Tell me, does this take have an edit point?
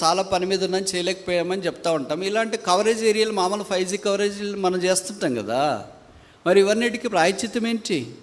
no; 0 cuts

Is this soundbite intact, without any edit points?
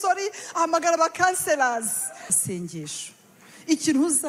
no; 1 cut; at 2.2 s

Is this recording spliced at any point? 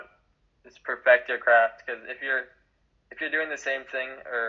no; 0 cuts

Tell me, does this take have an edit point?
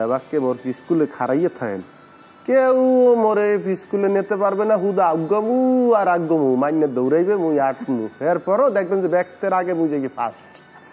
no; 0 cuts

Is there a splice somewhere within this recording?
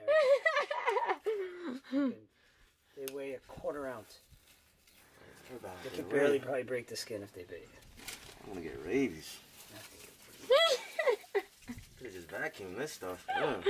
no; 0 cuts

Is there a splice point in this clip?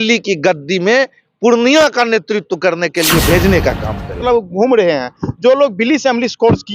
yes; 1 cut; at 4.2 s

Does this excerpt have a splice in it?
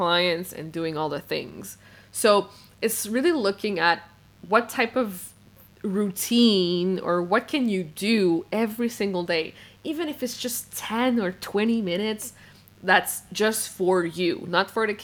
no; 0 cuts

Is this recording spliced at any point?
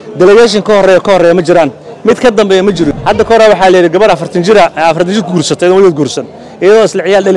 yes; 1 cut; at 2.9 s

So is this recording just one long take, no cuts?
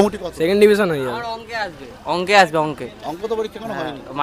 yes; 0 cuts

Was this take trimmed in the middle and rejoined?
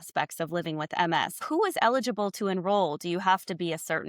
yes; 1 cut; at 1.4 s

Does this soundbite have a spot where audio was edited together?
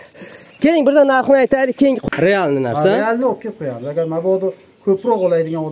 yes; 1 cut; at 2.0 s

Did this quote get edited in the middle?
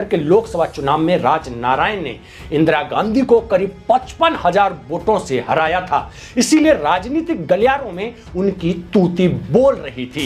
no; 0 cuts

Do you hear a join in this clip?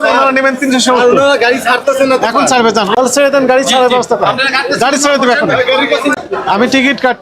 yes; 2 cuts; at 2.9 s, 6.2 s

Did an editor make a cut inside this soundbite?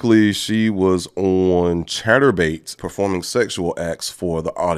yes; 1 cut; at 2.7 s

